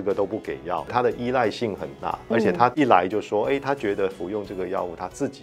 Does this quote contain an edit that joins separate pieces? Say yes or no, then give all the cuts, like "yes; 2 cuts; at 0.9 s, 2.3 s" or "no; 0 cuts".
yes; 2 cuts; at 0.9 s, 2.7 s